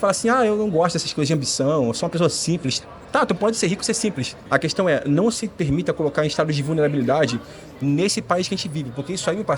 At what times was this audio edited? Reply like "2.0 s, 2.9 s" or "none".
4.3 s